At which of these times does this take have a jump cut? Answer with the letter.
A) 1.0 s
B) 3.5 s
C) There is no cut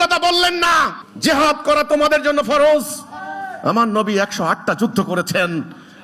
A